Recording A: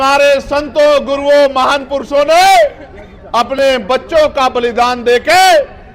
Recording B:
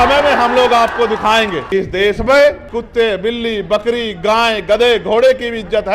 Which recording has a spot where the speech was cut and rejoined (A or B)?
B